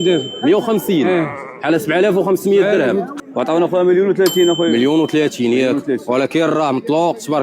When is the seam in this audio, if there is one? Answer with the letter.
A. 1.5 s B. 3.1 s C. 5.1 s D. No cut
B